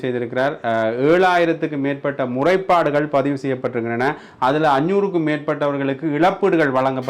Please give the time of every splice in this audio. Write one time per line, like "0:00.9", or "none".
none